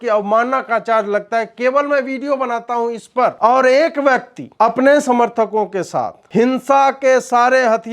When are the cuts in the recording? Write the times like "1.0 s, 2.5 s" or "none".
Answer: 3.3 s, 4.4 s, 6.2 s